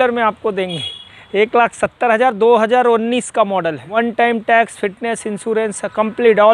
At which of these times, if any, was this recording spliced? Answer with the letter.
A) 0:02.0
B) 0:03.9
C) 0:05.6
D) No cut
B